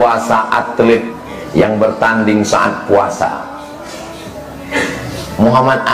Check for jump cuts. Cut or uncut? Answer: cut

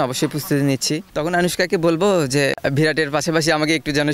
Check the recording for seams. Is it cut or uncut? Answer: cut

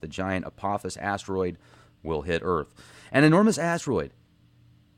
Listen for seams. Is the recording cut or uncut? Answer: cut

